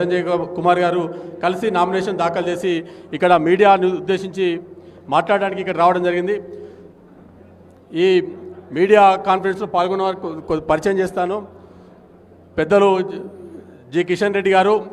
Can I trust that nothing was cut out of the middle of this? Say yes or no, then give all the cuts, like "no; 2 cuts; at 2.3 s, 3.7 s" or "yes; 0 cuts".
yes; 0 cuts